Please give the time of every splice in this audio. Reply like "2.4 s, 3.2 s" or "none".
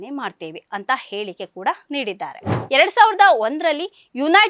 2.5 s